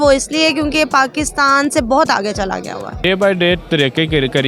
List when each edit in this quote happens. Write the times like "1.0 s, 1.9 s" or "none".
3.0 s